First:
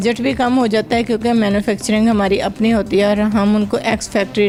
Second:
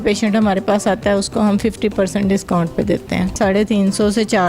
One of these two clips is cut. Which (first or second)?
second